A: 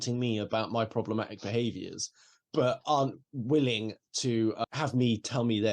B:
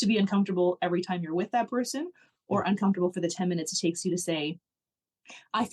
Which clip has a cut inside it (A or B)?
A